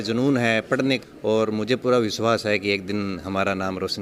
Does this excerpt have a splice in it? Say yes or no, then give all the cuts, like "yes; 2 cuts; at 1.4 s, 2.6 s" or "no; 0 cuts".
yes; 1 cut; at 1.0 s